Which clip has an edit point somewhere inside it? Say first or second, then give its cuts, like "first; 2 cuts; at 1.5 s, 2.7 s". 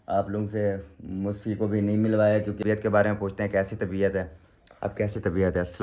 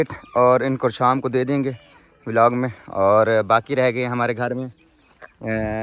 first; 1 cut; at 2.6 s